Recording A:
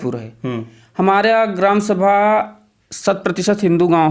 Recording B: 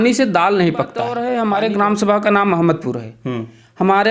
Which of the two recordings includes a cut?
B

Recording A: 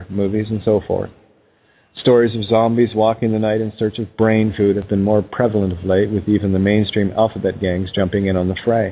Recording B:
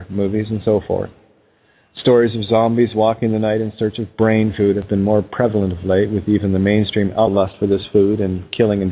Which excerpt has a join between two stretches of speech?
A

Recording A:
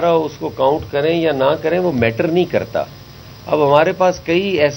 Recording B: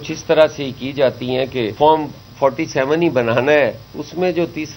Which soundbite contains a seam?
B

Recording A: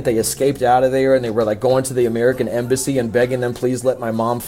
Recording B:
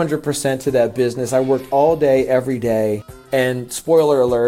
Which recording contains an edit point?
B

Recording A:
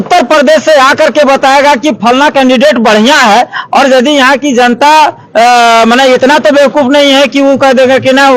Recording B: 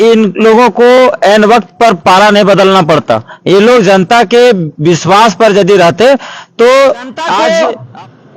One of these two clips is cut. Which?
B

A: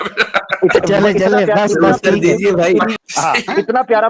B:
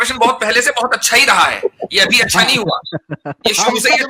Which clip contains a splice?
A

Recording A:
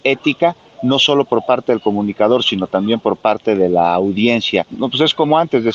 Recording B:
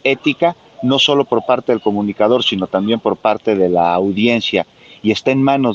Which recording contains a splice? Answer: A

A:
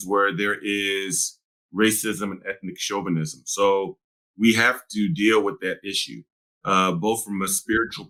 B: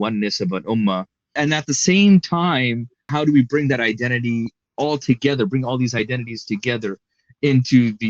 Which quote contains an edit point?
B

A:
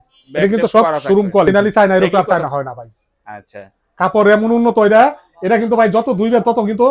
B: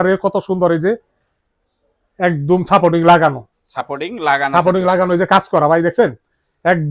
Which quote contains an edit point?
A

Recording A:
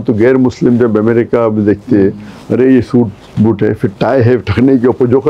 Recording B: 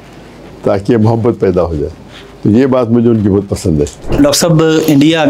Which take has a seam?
B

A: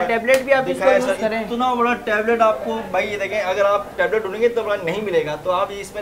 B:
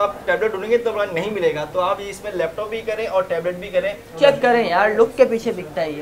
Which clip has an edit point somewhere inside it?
B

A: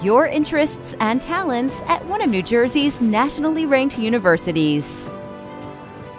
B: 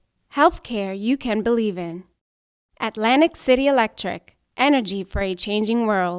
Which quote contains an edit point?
A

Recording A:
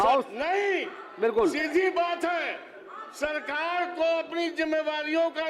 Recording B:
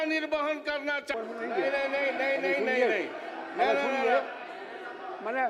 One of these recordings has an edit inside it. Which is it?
B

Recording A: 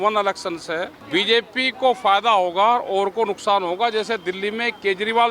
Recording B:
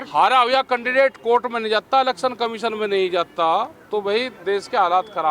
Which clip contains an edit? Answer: A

